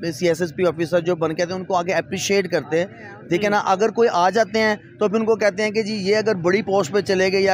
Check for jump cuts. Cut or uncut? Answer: uncut